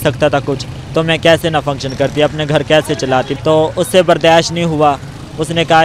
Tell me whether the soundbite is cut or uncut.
cut